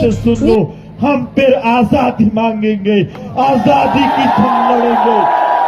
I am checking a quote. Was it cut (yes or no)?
no